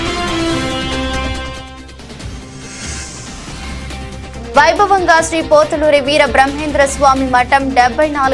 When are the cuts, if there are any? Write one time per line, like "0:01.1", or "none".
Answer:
0:03.2